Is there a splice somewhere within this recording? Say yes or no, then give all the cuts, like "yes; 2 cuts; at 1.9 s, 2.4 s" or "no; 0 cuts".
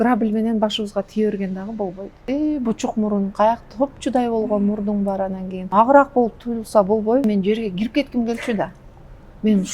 yes; 3 cuts; at 2.2 s, 5.6 s, 7.2 s